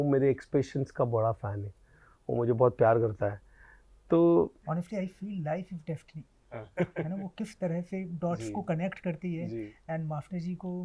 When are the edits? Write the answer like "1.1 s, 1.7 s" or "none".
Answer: 4.6 s